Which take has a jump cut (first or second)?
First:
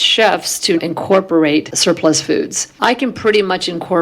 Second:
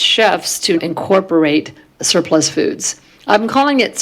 first